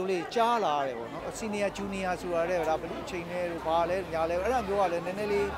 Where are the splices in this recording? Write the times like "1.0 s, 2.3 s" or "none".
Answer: 1.3 s